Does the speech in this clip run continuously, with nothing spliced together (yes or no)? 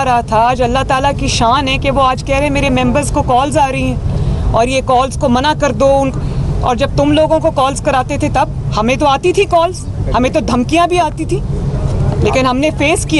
yes